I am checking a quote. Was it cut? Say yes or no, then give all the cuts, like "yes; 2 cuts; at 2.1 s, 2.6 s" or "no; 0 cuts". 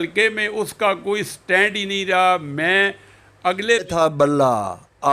yes; 1 cut; at 3.9 s